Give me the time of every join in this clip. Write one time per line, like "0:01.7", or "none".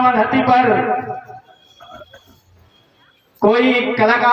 none